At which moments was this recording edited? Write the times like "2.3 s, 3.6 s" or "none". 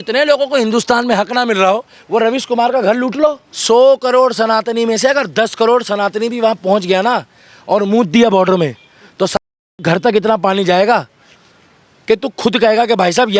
3.5 s